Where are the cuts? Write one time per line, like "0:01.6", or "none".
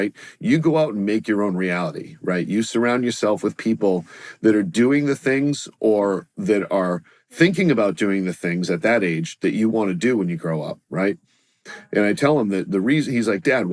none